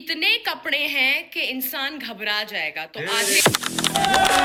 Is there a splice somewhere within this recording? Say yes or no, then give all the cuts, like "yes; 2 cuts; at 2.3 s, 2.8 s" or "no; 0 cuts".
no; 0 cuts